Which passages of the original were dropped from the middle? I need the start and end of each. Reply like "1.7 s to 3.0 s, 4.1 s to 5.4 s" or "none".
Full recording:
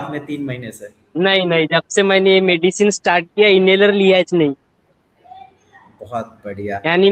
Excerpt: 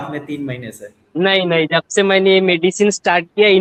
none